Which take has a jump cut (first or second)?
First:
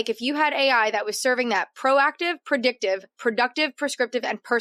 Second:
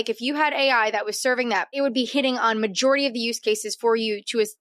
second